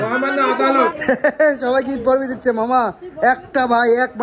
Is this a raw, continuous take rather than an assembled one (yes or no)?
no